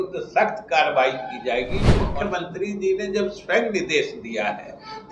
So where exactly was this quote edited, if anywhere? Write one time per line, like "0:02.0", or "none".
0:02.0